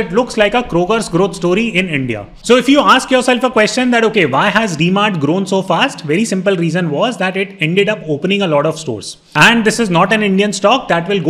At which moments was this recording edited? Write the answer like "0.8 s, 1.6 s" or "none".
2.3 s, 9.3 s